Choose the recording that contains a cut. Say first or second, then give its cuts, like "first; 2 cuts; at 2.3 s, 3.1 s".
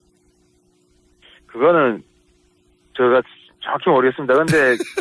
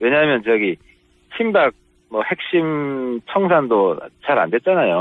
first; 1 cut; at 2.2 s